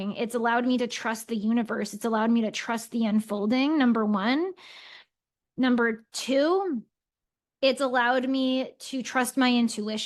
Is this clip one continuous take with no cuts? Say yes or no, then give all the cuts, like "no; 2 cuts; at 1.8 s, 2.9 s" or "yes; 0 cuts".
yes; 0 cuts